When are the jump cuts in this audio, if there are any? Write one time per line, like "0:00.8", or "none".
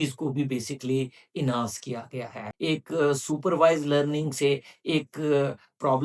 0:02.5